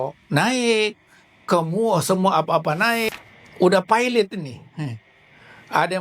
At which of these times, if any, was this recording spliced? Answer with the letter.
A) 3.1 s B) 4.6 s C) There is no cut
A